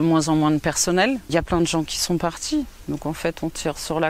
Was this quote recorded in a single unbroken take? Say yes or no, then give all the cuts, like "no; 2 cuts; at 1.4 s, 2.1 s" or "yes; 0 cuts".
no; 1 cut; at 1.3 s